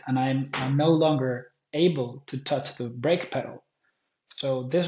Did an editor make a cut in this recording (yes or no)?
no